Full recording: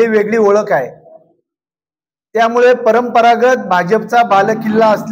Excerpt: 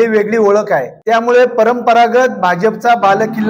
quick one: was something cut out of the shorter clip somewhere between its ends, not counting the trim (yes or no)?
yes